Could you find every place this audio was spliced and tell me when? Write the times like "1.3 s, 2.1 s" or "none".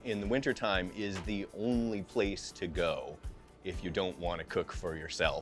none